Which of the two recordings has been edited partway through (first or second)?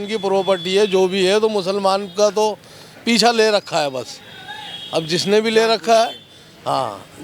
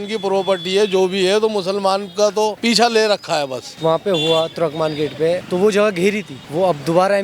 second